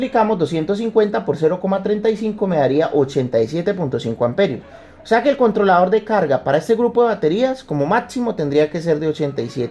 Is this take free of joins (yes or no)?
yes